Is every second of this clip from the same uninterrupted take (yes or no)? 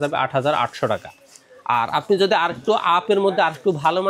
yes